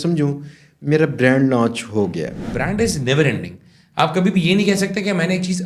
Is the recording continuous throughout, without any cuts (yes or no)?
no